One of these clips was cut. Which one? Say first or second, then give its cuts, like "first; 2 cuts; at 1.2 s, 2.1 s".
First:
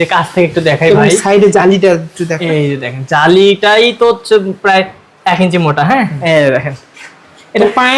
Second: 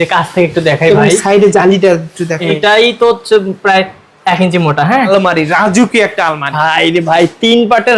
second; 2 cuts; at 2.6 s, 4.9 s